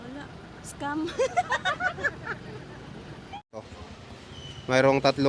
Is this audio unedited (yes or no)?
no